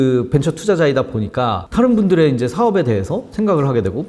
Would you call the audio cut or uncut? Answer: uncut